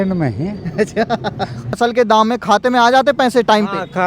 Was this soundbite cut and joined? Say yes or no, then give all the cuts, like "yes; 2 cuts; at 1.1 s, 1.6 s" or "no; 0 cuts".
yes; 1 cut; at 1.8 s